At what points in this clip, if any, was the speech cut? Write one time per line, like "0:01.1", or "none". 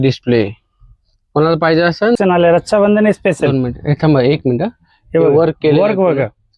0:02.2